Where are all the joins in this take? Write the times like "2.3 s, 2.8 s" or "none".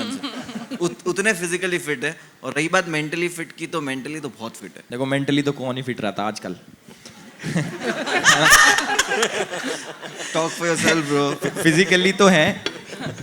4.7 s